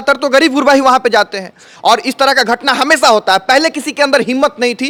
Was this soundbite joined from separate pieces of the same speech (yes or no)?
no